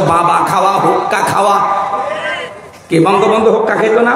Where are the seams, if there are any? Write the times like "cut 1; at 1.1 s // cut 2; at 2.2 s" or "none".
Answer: none